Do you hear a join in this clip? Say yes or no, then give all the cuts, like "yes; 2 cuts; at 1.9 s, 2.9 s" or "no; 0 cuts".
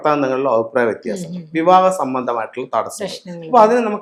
no; 0 cuts